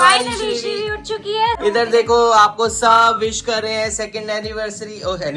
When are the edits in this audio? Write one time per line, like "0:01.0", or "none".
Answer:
0:01.6